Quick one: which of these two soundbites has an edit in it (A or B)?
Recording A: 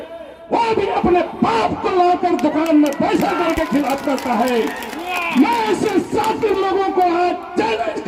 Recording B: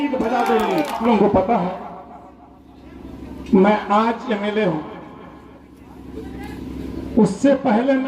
B